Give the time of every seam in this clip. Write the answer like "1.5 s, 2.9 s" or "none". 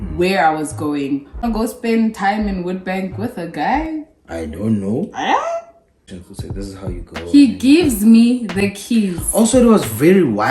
1.4 s, 6.2 s